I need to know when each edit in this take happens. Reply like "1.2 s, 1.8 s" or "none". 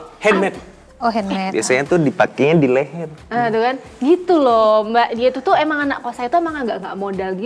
none